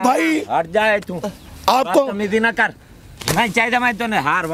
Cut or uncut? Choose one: uncut